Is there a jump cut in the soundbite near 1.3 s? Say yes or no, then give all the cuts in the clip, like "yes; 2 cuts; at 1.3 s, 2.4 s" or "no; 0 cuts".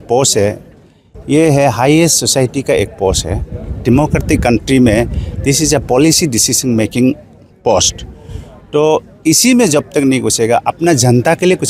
no; 0 cuts